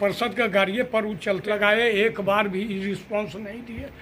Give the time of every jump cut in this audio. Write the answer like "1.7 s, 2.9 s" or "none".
none